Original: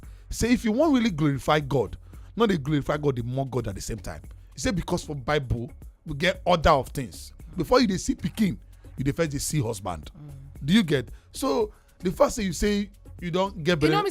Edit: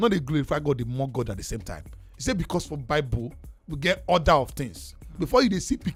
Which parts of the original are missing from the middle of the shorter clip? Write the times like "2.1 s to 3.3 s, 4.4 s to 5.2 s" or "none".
none